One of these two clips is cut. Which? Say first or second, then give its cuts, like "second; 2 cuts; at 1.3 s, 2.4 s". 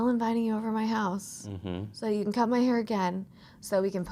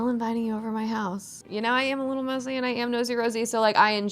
second; 1 cut; at 1.4 s